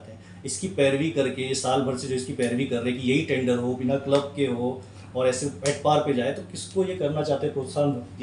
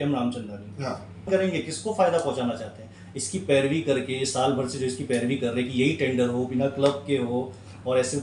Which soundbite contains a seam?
second; 1 cut; at 1.3 s

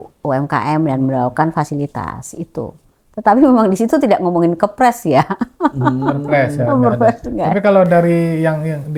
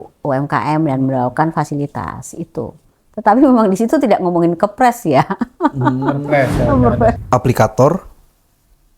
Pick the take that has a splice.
second; 1 cut; at 7.2 s

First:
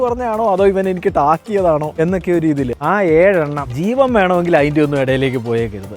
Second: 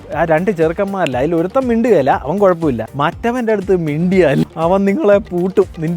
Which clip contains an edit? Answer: first; 1 cut; at 2.8 s

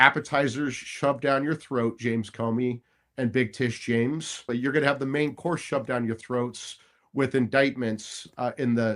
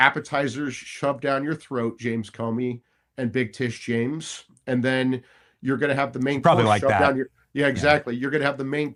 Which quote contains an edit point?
first; 1 cut; at 4.5 s

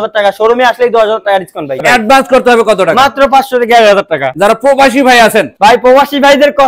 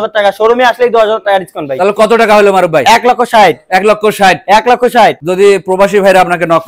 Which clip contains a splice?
first; 2 cuts; at 1.8 s, 4.3 s

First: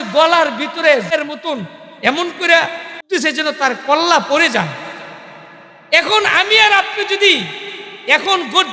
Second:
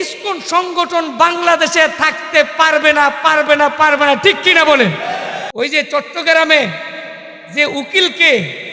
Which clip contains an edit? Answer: second; 1 cut; at 5.4 s

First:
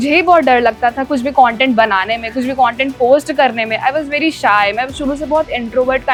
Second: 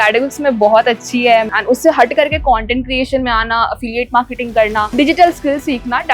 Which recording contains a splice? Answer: second; 2 cuts; at 1.5 s, 4.9 s

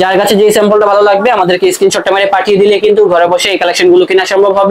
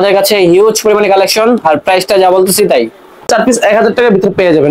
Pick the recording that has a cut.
second; 1 cut; at 3.3 s

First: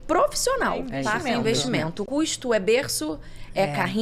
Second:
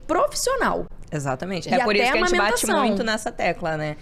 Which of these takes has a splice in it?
first; 2 cuts; at 0.9 s, 2.0 s

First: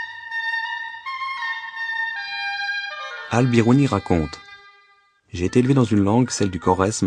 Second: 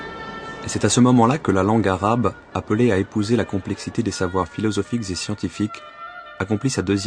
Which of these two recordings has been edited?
first; 1 cut; at 6.0 s

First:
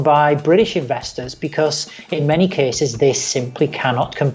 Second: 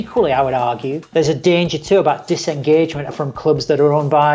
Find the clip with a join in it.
second; 2 cuts; at 0.9 s, 3.1 s

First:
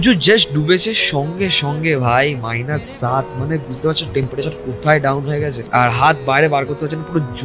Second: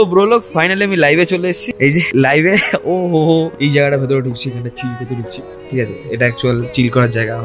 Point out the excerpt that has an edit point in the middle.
second; 1 cut; at 3.5 s

